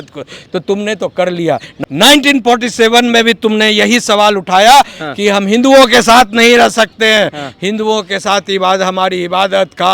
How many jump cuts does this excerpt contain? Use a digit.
1